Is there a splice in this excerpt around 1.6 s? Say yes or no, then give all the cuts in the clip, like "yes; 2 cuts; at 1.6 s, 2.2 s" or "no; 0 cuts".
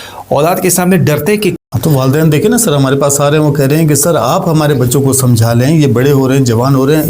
yes; 1 cut; at 1.6 s